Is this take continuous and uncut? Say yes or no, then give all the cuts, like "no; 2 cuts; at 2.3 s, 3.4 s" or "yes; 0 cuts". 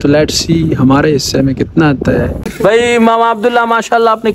no; 1 cut; at 2.4 s